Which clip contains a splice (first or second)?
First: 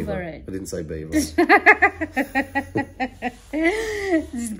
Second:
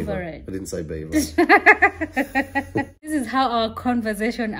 second